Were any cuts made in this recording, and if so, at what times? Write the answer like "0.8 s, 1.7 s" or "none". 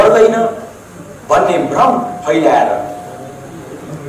none